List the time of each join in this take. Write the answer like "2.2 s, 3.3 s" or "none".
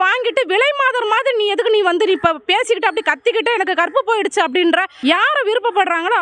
4.9 s

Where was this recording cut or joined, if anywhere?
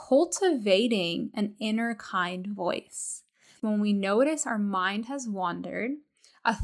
3.6 s

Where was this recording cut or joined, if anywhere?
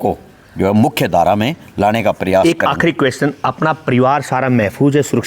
none

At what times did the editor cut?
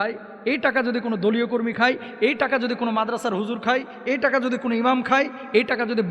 none

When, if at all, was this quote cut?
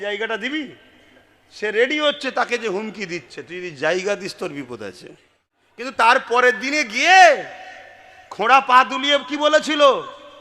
5.9 s

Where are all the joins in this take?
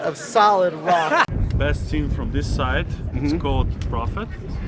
1.3 s

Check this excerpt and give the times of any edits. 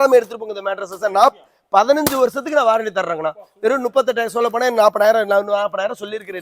none

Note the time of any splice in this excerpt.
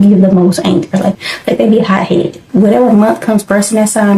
1.2 s, 2.4 s

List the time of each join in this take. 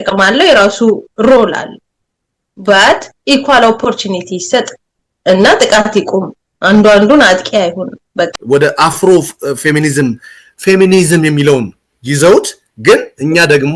8.4 s

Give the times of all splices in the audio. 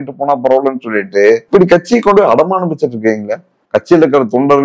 1.4 s, 3.5 s

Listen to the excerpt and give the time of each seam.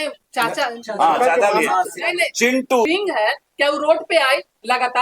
2.9 s

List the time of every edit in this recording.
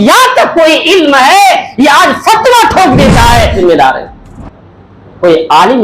3.6 s

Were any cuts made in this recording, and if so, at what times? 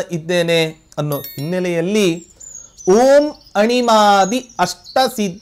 none

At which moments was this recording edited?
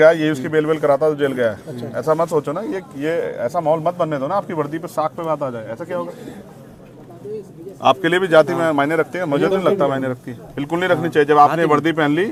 none

